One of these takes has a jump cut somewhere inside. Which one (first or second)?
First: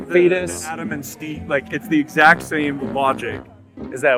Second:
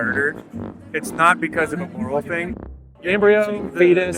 second